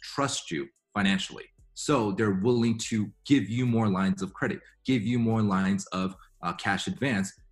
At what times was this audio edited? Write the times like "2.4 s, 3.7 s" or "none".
none